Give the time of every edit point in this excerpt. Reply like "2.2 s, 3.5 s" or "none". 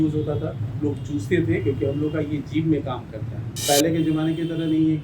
3.6 s